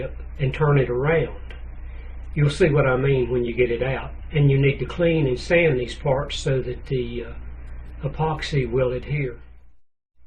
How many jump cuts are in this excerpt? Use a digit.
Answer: 1